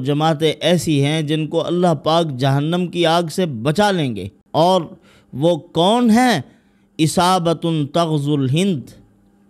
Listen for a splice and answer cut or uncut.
cut